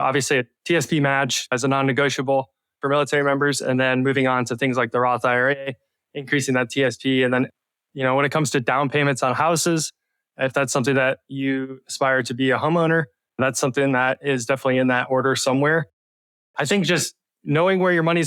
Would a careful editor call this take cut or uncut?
uncut